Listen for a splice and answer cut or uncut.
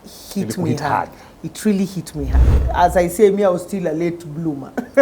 cut